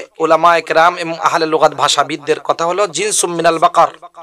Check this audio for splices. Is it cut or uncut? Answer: uncut